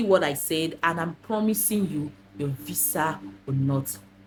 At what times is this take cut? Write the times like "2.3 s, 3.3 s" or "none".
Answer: none